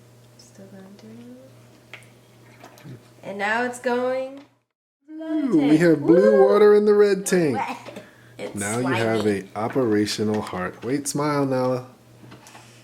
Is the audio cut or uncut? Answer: cut